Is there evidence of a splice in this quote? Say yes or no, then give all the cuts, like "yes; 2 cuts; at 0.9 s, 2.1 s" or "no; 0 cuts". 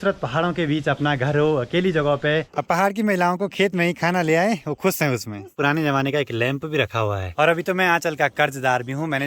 yes; 3 cuts; at 2.5 s, 5.5 s, 7.3 s